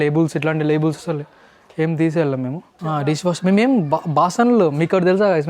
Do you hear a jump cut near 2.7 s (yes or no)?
yes